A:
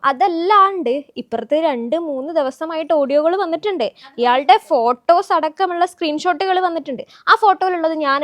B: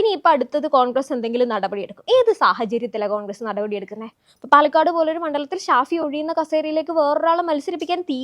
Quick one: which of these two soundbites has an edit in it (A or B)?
B